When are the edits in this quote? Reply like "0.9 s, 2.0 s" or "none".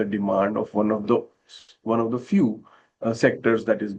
none